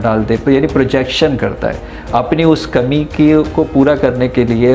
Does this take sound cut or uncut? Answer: uncut